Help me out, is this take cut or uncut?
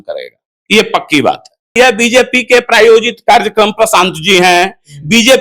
cut